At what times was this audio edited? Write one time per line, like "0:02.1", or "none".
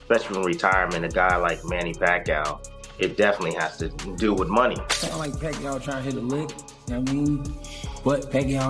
0:04.9